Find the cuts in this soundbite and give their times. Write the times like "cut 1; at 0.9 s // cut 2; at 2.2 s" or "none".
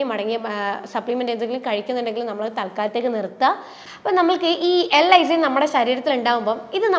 cut 1; at 3.7 s